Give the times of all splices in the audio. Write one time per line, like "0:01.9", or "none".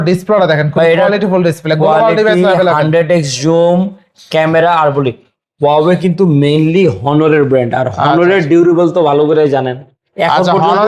none